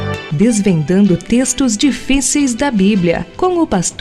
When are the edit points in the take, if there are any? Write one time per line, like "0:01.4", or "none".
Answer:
none